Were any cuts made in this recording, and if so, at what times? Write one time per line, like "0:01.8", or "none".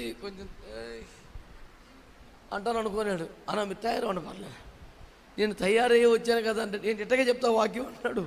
none